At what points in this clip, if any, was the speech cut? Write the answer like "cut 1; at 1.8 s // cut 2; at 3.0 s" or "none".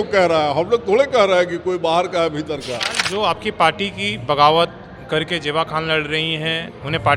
cut 1; at 3.0 s